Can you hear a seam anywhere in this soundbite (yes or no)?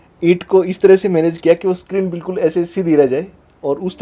no